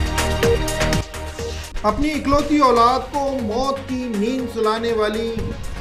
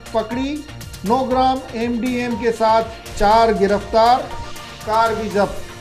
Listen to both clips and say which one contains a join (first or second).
first